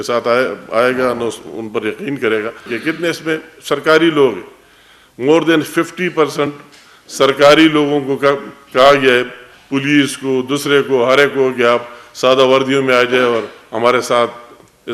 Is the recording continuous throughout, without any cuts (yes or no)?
no